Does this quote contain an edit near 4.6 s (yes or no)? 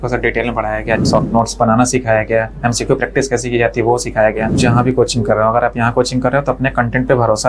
yes